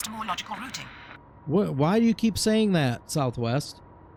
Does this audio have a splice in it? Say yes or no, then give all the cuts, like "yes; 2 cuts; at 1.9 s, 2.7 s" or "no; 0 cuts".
no; 0 cuts